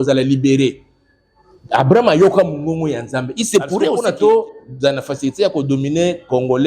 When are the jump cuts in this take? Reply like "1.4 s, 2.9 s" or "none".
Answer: 4.0 s

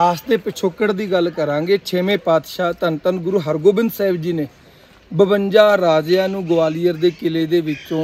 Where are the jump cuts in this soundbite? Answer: none

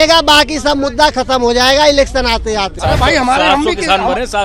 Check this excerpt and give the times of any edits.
2.8 s

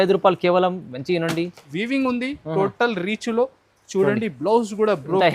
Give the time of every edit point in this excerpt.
1.7 s

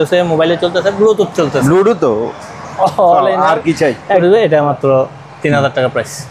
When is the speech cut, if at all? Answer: 4.2 s

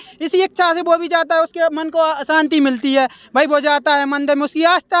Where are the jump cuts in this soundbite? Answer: none

